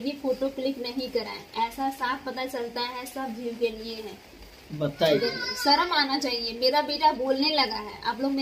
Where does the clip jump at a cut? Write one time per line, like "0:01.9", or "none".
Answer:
none